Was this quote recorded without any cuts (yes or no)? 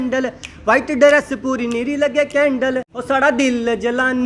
no